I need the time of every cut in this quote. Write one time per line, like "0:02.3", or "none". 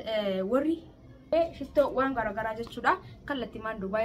0:01.3